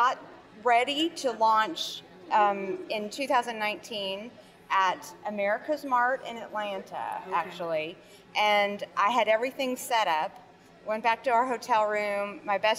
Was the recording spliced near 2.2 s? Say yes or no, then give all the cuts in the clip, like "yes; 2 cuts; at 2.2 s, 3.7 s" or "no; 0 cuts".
no; 0 cuts